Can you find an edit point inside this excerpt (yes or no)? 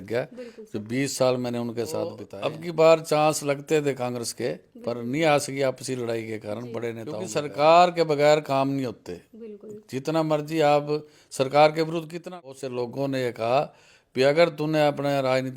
yes